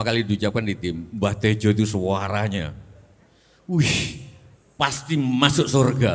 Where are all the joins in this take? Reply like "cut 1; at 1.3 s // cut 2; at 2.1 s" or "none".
none